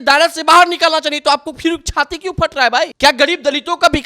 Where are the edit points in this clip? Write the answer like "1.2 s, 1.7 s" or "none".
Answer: 2.9 s